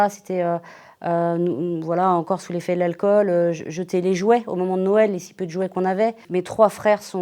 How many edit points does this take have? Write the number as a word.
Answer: one